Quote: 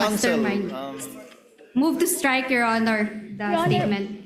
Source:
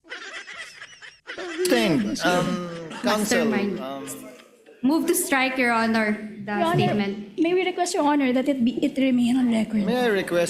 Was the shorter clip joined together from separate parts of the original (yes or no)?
no